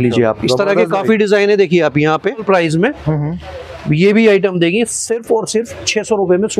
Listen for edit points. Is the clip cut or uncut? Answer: cut